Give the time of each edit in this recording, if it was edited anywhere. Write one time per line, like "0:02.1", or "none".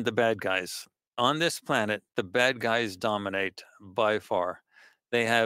0:01.0